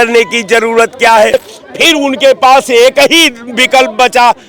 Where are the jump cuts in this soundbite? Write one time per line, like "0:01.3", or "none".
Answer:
0:01.3

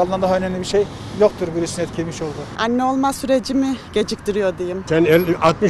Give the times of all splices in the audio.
0:02.4
0:04.8

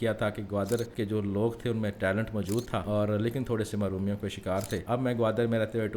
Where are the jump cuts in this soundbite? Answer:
0:00.9
0:02.9
0:04.8

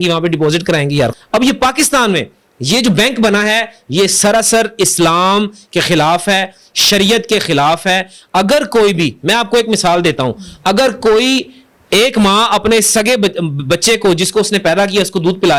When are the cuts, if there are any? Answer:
0:01.1

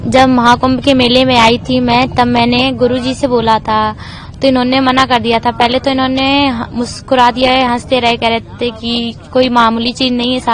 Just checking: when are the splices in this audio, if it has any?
none

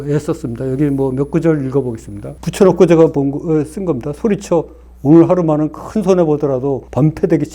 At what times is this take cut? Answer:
0:02.3

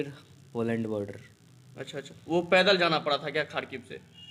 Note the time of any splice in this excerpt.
none

